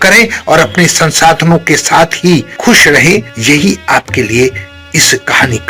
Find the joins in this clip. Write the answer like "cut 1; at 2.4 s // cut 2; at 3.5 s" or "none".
none